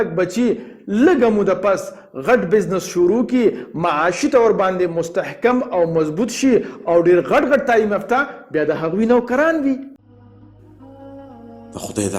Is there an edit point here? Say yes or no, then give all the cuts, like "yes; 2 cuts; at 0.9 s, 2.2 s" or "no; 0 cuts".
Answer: yes; 1 cut; at 9.9 s